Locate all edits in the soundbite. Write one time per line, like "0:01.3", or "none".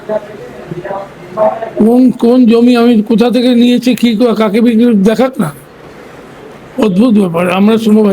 none